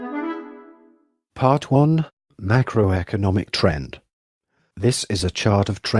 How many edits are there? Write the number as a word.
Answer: one